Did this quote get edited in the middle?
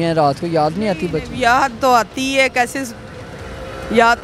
no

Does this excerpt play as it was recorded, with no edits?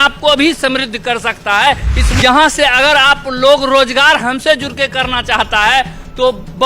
no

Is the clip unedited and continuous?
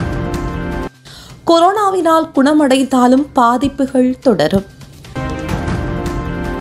yes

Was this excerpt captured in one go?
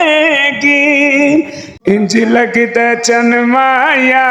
no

